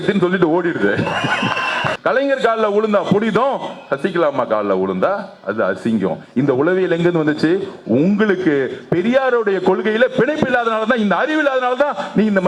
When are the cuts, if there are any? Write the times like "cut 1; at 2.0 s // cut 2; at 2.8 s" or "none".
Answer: cut 1; at 1.9 s